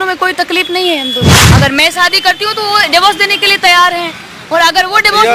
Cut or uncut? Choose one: cut